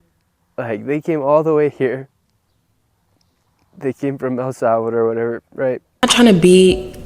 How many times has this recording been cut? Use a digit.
1